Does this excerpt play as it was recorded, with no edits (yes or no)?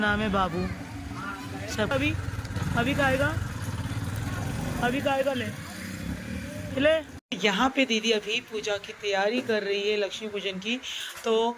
yes